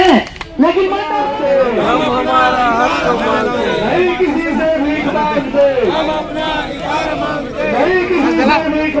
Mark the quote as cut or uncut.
cut